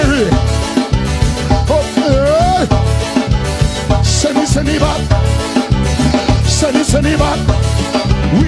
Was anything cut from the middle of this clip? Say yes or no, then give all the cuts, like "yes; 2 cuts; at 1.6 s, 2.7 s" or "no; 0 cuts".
no; 0 cuts